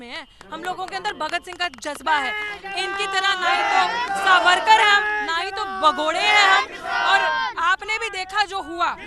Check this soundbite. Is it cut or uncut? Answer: uncut